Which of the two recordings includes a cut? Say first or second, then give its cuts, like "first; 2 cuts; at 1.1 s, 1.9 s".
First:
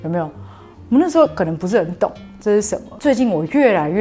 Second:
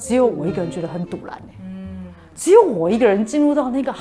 first; 1 cut; at 2.8 s